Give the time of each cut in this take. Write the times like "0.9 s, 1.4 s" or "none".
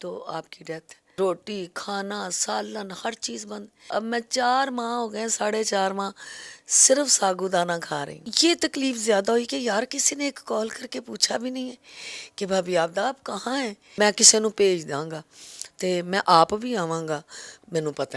1.0 s, 8.1 s, 13.8 s